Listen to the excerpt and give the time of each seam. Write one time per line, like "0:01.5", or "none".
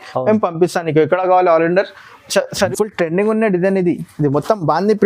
0:02.7